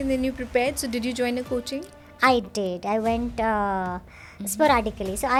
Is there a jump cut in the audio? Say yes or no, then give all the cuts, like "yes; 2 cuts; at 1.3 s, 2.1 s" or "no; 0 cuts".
no; 0 cuts